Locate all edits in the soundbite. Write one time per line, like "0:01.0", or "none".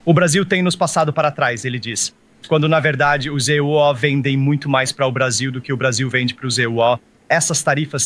0:07.1